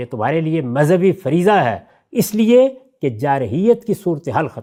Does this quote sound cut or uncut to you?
uncut